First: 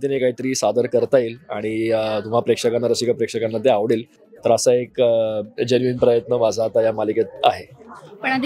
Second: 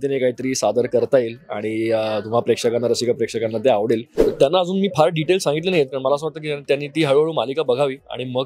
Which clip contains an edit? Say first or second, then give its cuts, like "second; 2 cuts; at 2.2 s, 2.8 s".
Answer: second; 1 cut; at 4.1 s